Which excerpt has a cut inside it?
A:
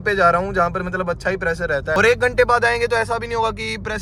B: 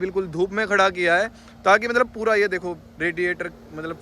A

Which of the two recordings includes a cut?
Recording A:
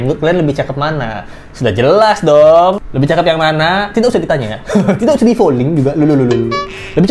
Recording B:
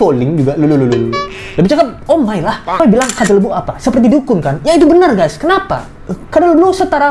B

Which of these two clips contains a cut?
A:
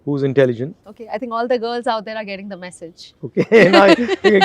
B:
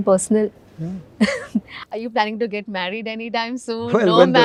A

